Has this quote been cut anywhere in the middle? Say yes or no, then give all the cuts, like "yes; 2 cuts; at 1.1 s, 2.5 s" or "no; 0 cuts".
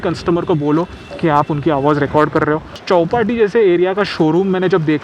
yes; 1 cut; at 2.8 s